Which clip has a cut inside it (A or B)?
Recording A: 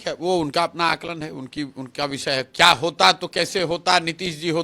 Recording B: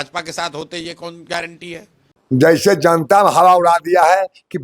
B